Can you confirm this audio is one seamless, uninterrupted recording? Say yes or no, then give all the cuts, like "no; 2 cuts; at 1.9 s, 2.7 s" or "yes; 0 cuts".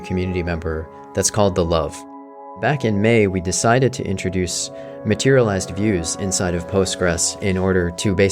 no; 1 cut; at 2.6 s